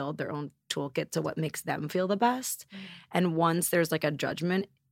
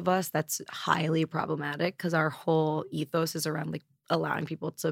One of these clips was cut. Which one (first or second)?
second